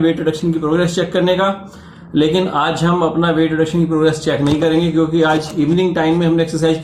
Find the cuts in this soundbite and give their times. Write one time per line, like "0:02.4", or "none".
none